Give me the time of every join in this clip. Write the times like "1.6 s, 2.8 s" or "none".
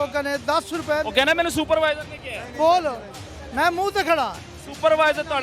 none